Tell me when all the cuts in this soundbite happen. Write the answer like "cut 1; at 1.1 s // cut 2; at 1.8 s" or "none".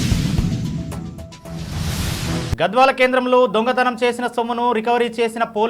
cut 1; at 2.5 s